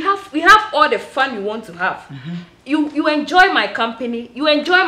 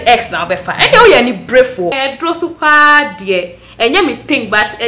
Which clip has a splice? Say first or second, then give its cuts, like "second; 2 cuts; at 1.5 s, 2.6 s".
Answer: second; 1 cut; at 2.0 s